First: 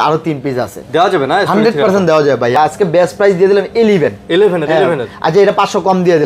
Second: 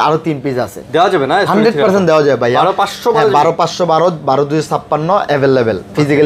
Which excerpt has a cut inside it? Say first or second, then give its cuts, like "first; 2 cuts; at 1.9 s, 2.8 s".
first; 1 cut; at 2.5 s